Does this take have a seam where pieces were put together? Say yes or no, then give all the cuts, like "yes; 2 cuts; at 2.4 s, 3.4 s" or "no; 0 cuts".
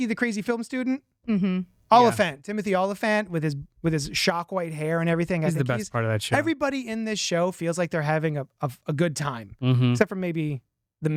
no; 0 cuts